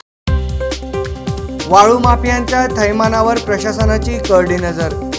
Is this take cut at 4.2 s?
no; 1 cut; at 1.0 s

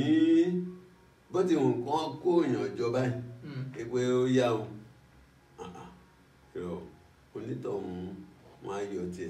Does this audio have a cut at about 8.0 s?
no; 0 cuts

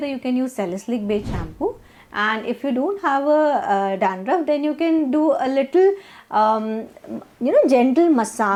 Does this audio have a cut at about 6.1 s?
no; 0 cuts

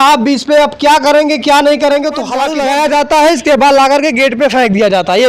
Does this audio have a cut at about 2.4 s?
yes; 1 cut; at 2.4 s

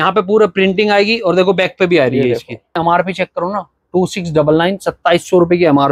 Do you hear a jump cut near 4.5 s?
no; 1 cut; at 2.7 s

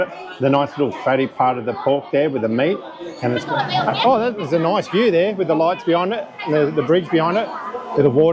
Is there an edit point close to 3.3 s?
yes; 1 cut; at 3.3 s

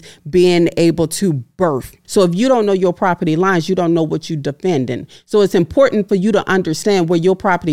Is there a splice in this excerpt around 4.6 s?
no; 1 cut; at 1.9 s

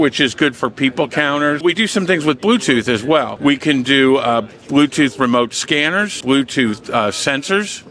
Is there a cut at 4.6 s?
no; 3 cuts; at 1.6 s, 3.3 s, 6.2 s

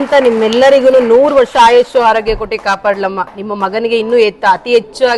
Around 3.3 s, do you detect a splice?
no; 0 cuts

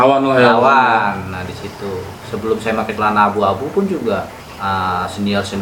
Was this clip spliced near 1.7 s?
no; 1 cut; at 4.4 s

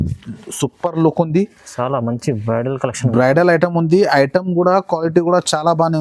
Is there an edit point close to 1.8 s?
no; 0 cuts

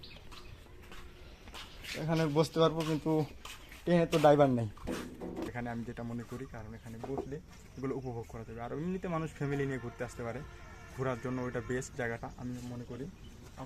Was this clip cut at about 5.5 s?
yes; 1 cut; at 5.5 s

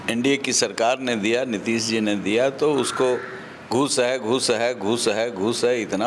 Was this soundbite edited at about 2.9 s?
no; 0 cuts

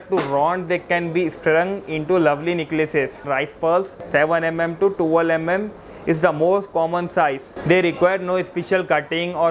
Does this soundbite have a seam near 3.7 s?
yes; 2 cuts; at 3.7 s, 7.5 s

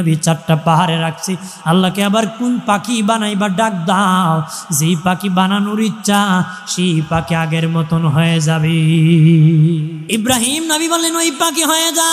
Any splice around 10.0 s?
yes; 1 cut; at 10.0 s

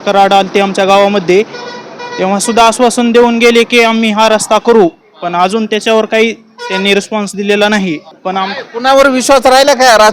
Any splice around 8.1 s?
yes; 1 cut; at 8.1 s

